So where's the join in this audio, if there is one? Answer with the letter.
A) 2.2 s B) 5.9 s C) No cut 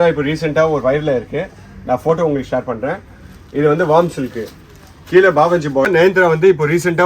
B